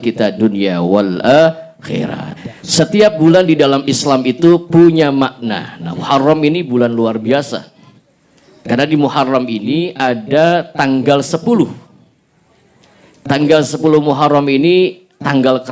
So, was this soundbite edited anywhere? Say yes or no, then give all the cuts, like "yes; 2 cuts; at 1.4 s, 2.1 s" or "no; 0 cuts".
yes; 1 cut; at 2.2 s